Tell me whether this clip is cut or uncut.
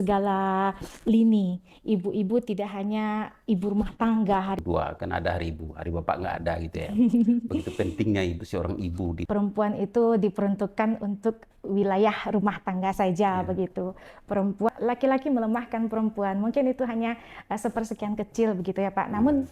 cut